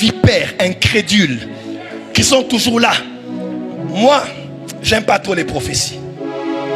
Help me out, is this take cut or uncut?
uncut